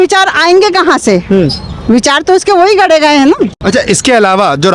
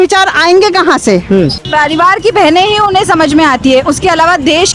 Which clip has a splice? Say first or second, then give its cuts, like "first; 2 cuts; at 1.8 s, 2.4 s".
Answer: second; 1 cut; at 1.6 s